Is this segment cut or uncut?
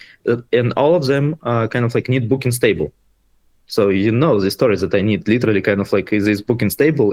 uncut